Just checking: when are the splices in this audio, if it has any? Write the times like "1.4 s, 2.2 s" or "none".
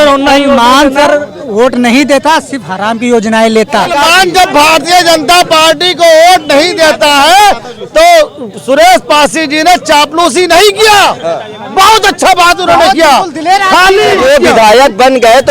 3.9 s, 14.2 s